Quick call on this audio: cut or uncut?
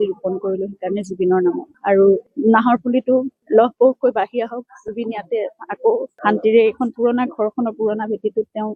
uncut